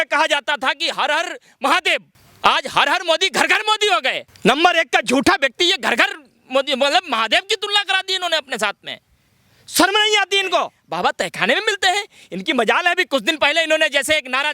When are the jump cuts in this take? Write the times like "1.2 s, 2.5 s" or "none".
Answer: 2.2 s, 4.3 s, 10.8 s